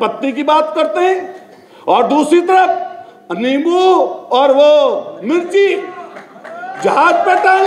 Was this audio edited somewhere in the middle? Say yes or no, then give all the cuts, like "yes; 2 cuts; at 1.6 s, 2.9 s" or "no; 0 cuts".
no; 0 cuts